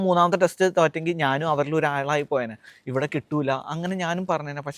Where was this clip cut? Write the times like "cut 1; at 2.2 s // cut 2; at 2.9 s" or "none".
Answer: none